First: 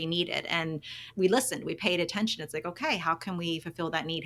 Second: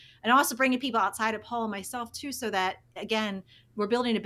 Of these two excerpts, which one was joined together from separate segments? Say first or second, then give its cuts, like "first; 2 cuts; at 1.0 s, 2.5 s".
first; 1 cut; at 1.1 s